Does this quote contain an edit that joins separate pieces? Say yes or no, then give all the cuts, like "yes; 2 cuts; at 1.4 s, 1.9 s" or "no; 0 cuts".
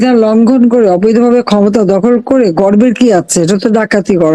no; 0 cuts